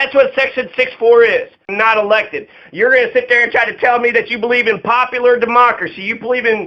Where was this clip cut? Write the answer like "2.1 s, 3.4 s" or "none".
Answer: 1.6 s